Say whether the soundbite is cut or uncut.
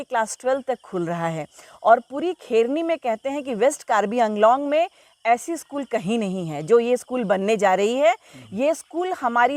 uncut